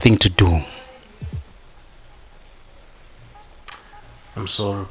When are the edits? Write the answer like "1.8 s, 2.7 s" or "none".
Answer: 1.5 s